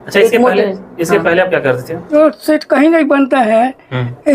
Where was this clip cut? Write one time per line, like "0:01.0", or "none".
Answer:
0:02.1